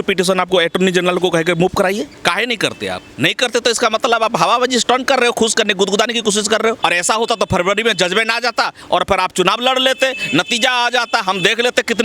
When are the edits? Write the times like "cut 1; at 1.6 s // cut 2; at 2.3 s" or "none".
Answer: cut 1; at 2.1 s // cut 2; at 3.1 s // cut 3; at 6.8 s